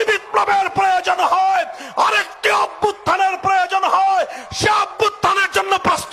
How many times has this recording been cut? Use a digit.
0